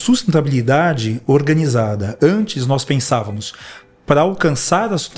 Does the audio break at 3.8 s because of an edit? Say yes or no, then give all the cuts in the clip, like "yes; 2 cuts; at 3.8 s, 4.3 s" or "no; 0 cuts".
no; 0 cuts